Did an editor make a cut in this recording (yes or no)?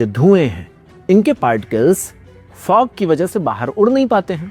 no